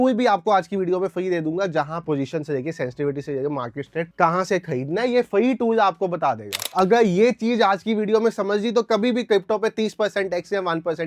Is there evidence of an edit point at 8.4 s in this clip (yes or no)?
no